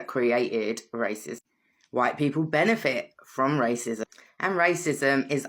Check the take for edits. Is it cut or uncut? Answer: uncut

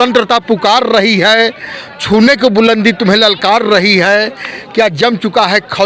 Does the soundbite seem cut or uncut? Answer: uncut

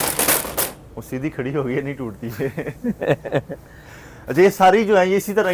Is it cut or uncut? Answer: uncut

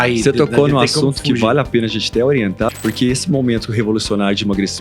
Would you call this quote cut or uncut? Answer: cut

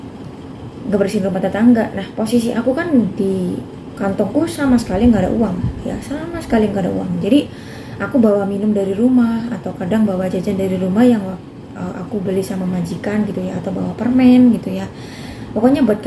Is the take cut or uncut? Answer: uncut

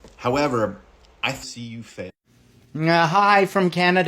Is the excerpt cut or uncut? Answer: cut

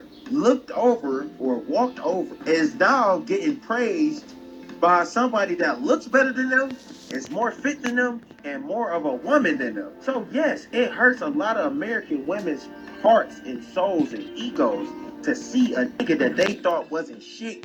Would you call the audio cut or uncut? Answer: uncut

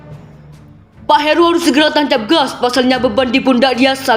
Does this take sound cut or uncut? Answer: cut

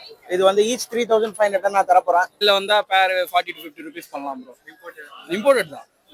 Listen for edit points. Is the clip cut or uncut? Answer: cut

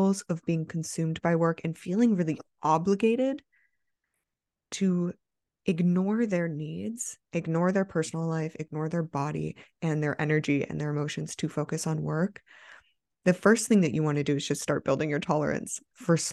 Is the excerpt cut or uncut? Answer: cut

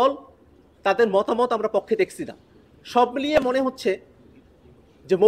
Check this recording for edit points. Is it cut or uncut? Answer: uncut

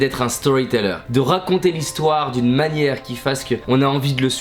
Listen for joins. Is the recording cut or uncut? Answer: cut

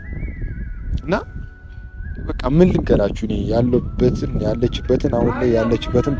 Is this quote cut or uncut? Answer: uncut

